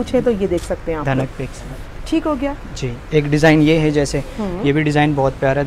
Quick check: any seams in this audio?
no; 0 cuts

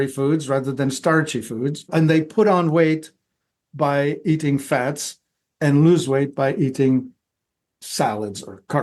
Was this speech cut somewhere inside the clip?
yes; 1 cut; at 1.9 s

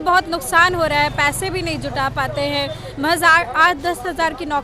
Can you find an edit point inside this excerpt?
no; 0 cuts

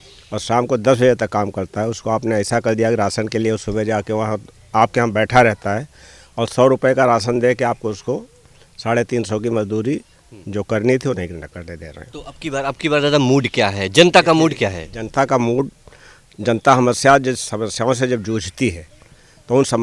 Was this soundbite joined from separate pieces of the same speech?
no; 0 cuts

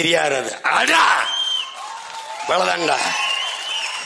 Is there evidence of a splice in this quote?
no; 0 cuts

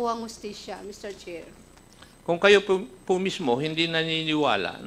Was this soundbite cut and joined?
yes; 1 cut; at 1.7 s

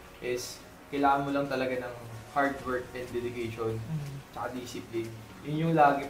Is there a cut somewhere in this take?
no; 0 cuts

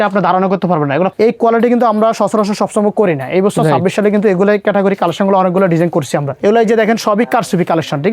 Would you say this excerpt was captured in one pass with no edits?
no; 2 cuts; at 1.1 s, 6.3 s

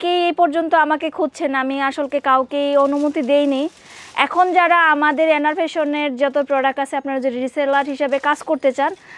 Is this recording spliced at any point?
no; 0 cuts

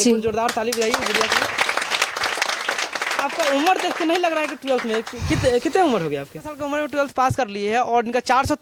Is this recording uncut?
yes; 0 cuts

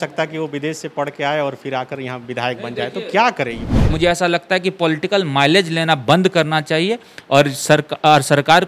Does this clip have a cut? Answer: yes; 1 cut; at 3.7 s

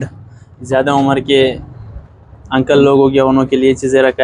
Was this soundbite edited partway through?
no; 0 cuts

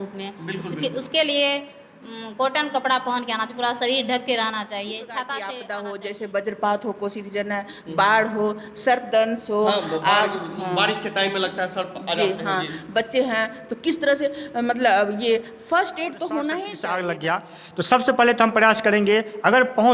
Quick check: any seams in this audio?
yes; 2 cuts; at 5.6 s, 16.8 s

